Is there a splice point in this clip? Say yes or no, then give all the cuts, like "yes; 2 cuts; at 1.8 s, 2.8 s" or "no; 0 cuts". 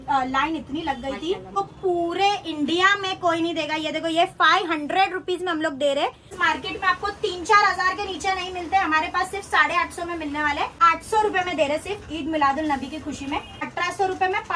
yes; 4 cuts; at 1.5 s, 6.3 s, 10.7 s, 13.6 s